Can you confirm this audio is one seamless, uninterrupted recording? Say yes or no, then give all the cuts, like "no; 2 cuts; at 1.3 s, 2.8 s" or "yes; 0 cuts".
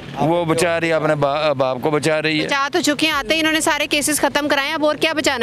yes; 0 cuts